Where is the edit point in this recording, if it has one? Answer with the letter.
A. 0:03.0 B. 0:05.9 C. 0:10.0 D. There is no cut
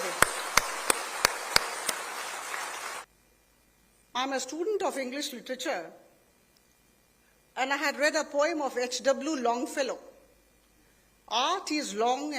A